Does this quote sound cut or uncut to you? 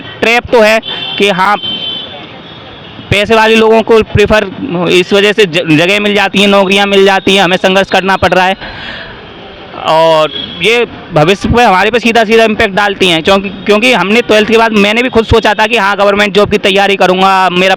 uncut